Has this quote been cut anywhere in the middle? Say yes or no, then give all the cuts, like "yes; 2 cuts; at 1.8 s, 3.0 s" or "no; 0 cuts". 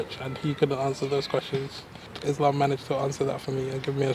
yes; 1 cut; at 2.1 s